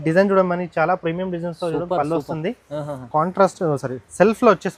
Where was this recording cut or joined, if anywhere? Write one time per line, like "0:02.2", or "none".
none